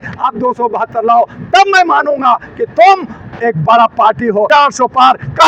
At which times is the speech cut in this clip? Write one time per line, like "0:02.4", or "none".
0:04.5

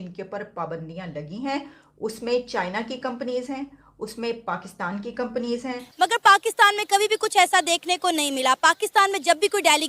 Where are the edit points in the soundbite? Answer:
0:05.8

